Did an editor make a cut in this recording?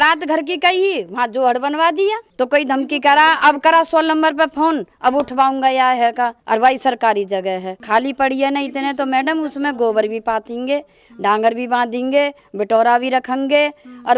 yes; 1 cut; at 2.3 s

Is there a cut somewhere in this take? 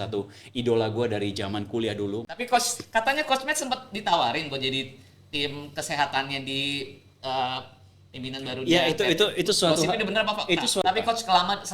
yes; 2 cuts; at 2.3 s, 10.8 s

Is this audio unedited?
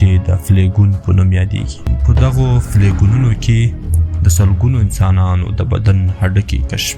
no; 1 cut; at 1.9 s

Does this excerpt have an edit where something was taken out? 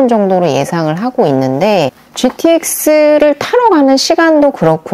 yes; 1 cut; at 1.9 s

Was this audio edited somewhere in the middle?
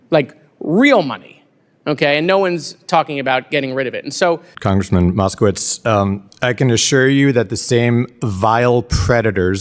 yes; 1 cut; at 4.5 s

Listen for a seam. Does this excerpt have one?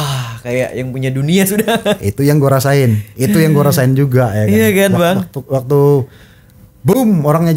no; 0 cuts

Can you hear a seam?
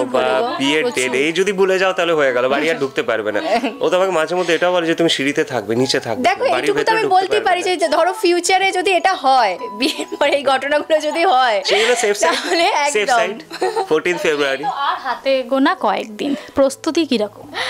no; 0 cuts

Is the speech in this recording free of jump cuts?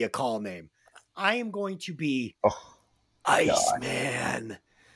yes; 0 cuts

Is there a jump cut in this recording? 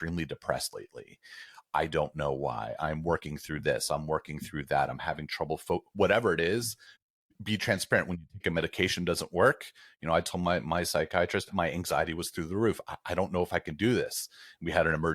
yes; 1 cut; at 11.5 s

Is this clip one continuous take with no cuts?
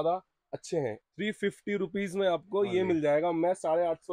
no; 1 cut; at 1.0 s

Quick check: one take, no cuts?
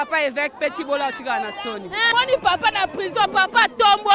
no; 1 cut; at 2.1 s

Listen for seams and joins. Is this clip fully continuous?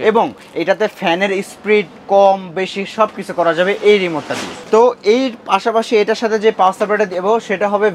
yes; 0 cuts

